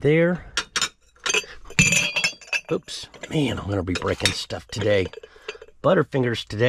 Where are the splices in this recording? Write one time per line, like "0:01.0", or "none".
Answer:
none